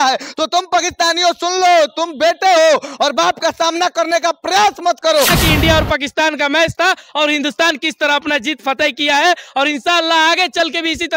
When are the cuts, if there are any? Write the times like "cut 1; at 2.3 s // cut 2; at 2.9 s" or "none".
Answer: cut 1; at 5.4 s